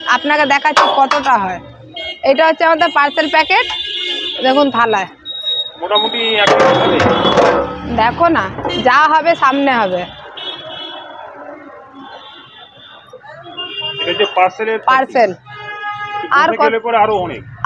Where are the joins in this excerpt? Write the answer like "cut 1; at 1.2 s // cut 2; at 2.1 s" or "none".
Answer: none